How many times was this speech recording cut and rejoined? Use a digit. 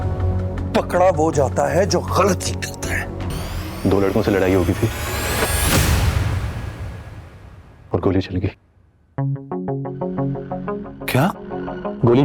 1